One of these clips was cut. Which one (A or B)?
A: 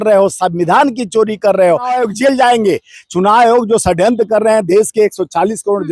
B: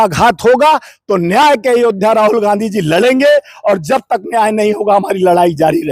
A